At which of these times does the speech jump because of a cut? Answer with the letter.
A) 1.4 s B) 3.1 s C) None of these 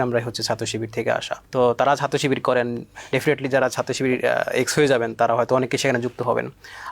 A